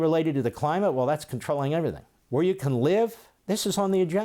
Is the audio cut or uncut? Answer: cut